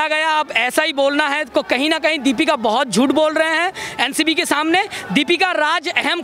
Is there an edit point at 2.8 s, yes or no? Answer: no